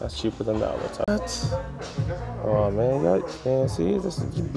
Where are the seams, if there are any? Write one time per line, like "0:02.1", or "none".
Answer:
0:01.0